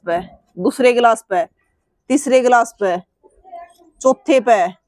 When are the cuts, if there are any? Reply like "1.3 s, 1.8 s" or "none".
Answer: none